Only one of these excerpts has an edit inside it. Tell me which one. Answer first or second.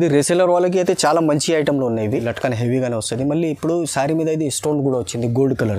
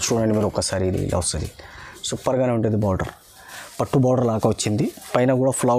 first